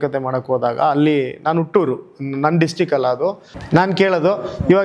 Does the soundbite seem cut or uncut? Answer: cut